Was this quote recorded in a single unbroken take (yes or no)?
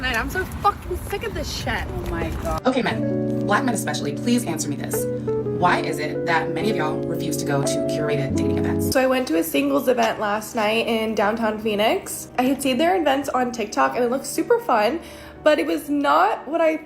no